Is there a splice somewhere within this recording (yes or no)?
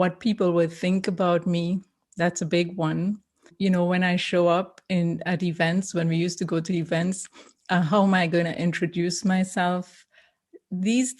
yes